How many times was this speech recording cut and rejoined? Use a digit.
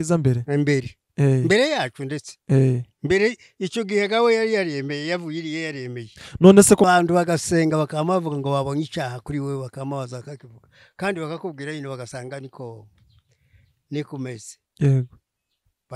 1